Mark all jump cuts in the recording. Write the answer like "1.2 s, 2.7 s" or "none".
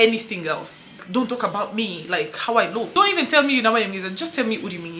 1.0 s, 2.9 s